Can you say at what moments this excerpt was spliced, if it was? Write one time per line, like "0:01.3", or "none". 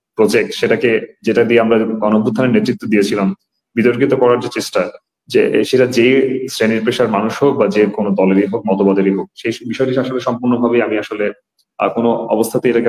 none